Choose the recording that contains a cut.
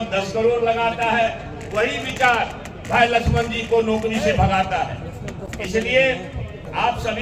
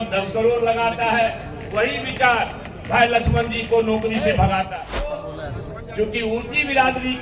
second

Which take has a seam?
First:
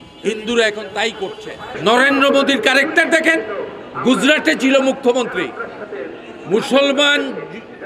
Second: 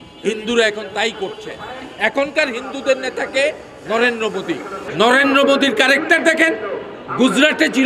first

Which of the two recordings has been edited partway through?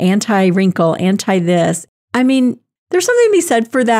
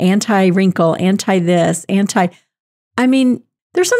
first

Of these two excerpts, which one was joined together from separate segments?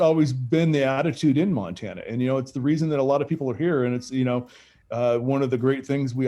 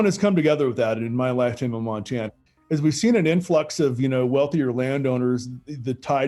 second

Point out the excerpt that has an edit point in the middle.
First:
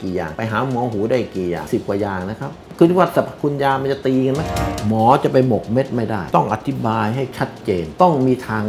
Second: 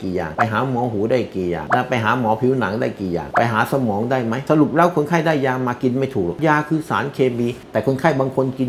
first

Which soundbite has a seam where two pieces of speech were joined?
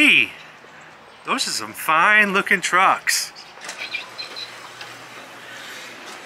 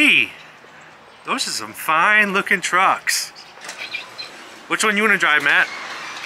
second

